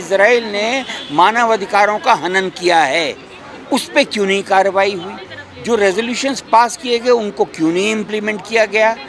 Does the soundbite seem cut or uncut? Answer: uncut